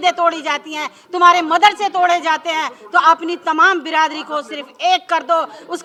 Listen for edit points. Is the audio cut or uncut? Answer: uncut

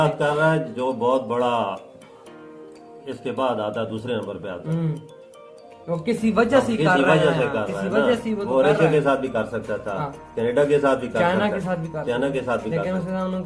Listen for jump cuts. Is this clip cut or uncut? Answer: uncut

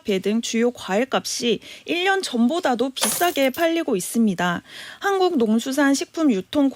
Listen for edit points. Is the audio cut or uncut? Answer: uncut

